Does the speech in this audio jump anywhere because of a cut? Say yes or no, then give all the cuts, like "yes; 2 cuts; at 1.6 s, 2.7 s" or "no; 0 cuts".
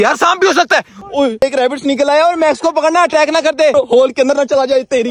yes; 2 cuts; at 1.4 s, 3.7 s